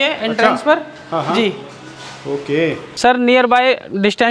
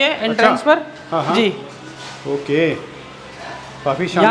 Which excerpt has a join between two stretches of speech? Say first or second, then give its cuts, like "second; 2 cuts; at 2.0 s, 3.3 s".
first; 1 cut; at 2.9 s